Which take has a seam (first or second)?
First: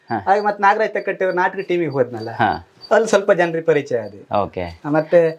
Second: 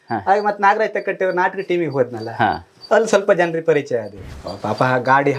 second